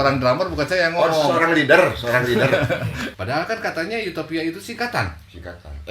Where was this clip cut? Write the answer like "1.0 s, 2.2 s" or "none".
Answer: 3.1 s